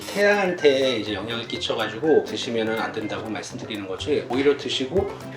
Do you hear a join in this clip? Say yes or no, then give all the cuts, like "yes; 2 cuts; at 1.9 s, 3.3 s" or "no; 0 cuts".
yes; 2 cuts; at 2.4 s, 4.3 s